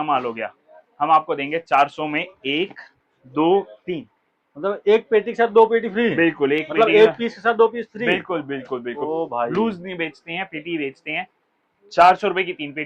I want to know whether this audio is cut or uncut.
uncut